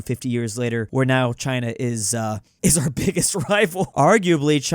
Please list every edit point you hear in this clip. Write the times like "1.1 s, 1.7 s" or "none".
0.9 s, 2.5 s, 3.8 s